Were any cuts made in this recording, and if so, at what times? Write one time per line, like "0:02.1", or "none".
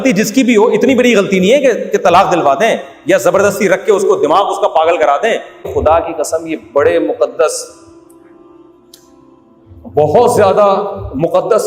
0:05.7